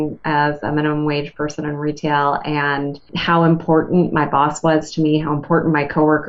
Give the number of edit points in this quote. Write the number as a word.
one